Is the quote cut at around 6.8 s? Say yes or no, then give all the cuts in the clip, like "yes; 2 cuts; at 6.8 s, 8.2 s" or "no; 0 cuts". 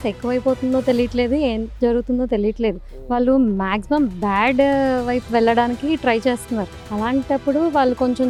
no; 0 cuts